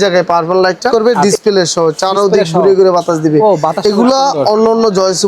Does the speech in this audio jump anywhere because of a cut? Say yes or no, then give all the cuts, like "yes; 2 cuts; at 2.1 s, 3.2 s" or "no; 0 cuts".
yes; 1 cut; at 0.9 s